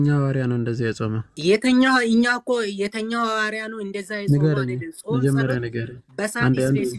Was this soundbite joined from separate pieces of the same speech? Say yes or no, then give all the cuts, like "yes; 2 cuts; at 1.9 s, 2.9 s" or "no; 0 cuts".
yes; 1 cut; at 1.3 s